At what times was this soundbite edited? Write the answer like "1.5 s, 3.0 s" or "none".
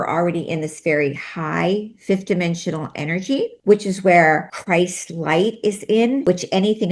3.6 s, 4.5 s, 6.2 s